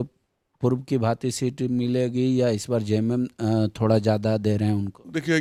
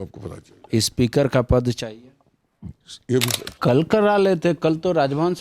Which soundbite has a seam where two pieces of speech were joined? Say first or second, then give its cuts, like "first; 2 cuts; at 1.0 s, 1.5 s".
second; 1 cut; at 3.5 s